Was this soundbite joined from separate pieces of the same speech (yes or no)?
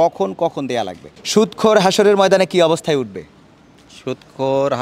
yes